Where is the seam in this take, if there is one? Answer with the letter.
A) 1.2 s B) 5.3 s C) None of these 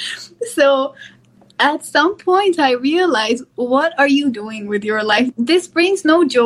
B